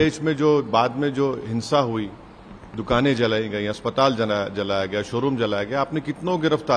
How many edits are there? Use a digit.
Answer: 0